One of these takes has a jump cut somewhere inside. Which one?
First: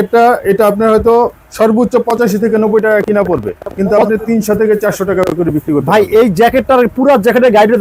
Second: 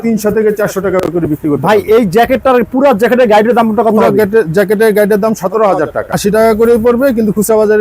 second; 1 cut; at 6.1 s

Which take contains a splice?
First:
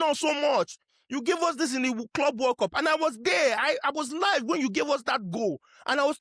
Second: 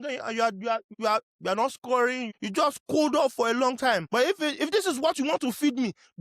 second; 3 cuts; at 0.9 s, 2.3 s, 4.0 s

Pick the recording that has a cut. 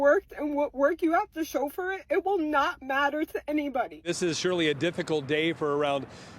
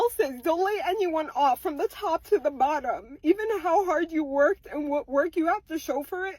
first; 1 cut; at 4.0 s

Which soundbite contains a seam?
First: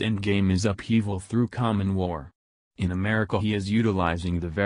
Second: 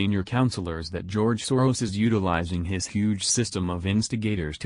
first; 1 cut; at 1.0 s

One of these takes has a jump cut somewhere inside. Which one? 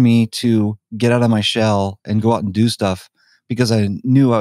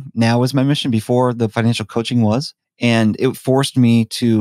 second; 2 cuts; at 1.5 s, 2.6 s

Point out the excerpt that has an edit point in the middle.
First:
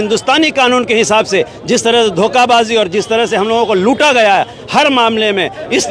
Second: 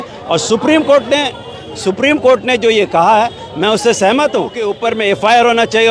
second; 1 cut; at 4.7 s

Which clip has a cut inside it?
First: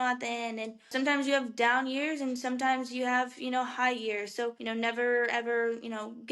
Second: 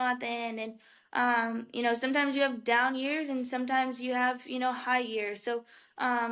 first; 2 cuts; at 0.9 s, 4.6 s

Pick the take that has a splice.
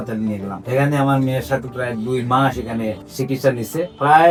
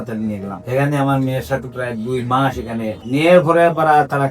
second; 1 cut; at 3.0 s

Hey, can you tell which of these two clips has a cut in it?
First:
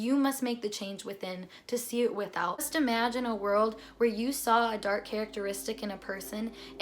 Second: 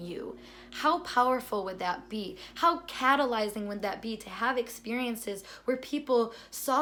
first; 1 cut; at 2.6 s

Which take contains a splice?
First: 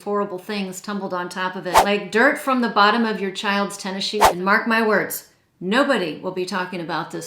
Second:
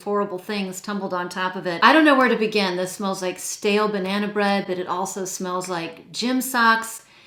first; 2 cuts; at 1.8 s, 4.3 s

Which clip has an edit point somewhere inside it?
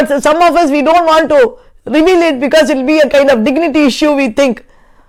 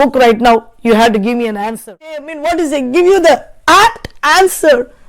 second; 1 cut; at 2.3 s

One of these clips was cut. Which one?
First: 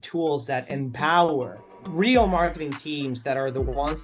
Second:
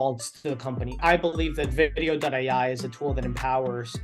second; 1 cut; at 1.0 s

